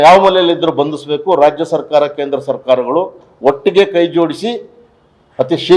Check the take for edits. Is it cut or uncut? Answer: uncut